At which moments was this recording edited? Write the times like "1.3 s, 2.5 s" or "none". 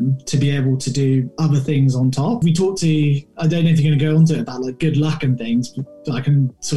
2.4 s